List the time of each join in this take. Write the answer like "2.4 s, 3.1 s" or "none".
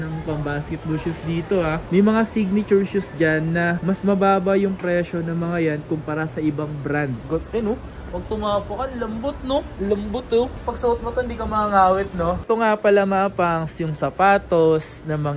1.8 s, 7.2 s, 12.4 s